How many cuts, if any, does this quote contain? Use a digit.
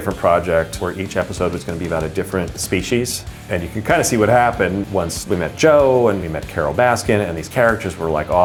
0